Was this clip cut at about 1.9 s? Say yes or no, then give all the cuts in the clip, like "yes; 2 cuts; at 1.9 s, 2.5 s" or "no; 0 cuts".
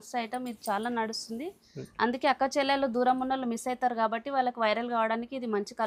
no; 0 cuts